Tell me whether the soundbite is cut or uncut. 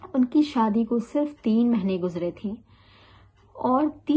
uncut